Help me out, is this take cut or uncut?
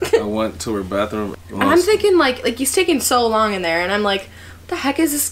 cut